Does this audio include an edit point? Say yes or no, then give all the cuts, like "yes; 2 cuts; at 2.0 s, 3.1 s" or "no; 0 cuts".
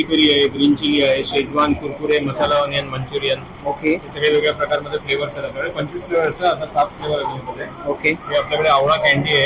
no; 0 cuts